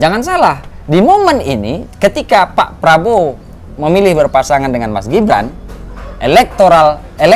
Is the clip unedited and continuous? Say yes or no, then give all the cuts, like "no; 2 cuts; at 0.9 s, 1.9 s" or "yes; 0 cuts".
yes; 0 cuts